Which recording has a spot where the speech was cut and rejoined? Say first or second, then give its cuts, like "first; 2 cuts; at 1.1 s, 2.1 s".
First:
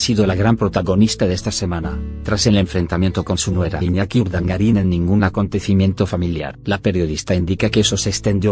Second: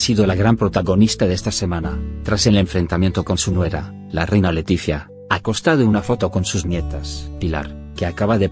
second; 1 cut; at 3.8 s